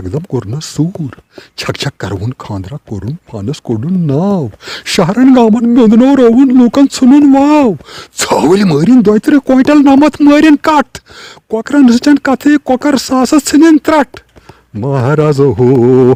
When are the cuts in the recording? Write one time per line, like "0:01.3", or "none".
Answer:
none